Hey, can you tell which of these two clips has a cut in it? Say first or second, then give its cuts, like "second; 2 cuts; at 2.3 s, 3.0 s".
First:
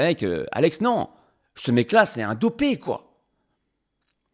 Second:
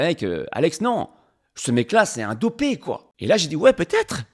second; 1 cut; at 3.1 s